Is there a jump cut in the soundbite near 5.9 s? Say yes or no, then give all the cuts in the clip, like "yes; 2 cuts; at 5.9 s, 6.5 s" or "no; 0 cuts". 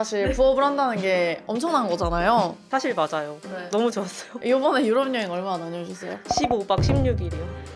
no; 0 cuts